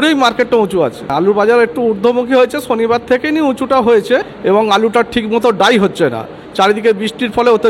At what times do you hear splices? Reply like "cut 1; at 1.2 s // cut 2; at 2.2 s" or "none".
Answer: cut 1; at 1.1 s // cut 2; at 4.3 s